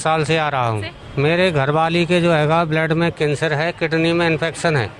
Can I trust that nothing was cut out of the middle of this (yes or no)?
no